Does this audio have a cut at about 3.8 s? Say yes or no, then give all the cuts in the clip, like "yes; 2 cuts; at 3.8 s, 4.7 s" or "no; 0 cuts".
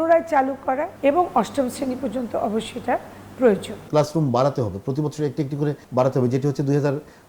yes; 3 cuts; at 0.9 s, 3.8 s, 5.8 s